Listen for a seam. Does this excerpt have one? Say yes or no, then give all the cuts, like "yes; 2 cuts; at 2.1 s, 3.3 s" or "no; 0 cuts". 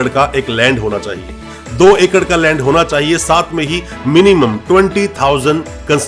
no; 0 cuts